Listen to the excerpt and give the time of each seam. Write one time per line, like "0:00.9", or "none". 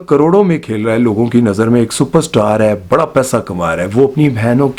none